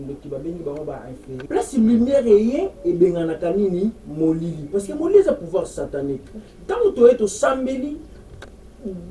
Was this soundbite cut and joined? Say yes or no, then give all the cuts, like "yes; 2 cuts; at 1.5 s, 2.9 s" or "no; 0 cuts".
yes; 1 cut; at 1.3 s